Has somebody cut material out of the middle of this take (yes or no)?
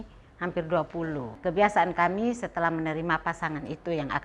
yes